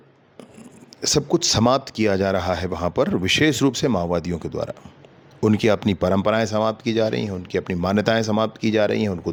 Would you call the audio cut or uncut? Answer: uncut